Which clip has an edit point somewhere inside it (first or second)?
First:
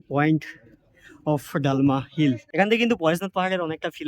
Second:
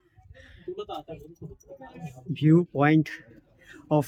first